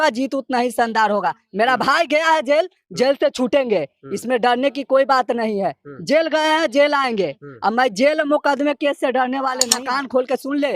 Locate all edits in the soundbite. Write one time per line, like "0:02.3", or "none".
0:09.7

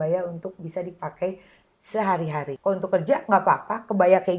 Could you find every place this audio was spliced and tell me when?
0:02.5

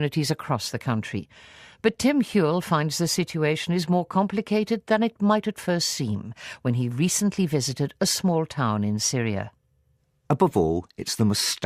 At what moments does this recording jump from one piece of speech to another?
0:05.1

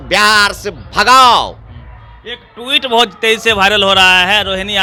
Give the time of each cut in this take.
none

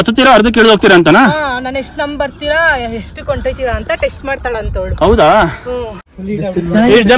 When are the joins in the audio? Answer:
0:06.1

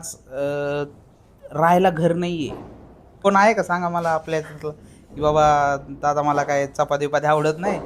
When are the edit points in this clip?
0:03.2

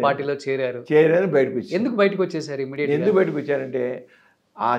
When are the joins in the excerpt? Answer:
none

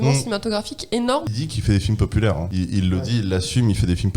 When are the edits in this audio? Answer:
0:01.2
0:02.5

